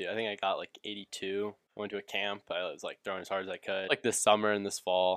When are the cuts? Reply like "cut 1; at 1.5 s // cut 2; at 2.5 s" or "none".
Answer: cut 1; at 1.6 s // cut 2; at 3.9 s